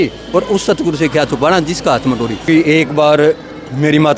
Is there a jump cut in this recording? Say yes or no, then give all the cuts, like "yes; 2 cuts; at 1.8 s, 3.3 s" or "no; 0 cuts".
yes; 1 cut; at 2.4 s